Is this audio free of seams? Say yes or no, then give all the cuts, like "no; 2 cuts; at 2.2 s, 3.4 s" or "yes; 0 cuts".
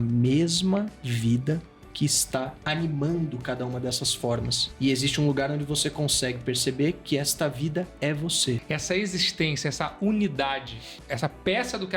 no; 1 cut; at 8.6 s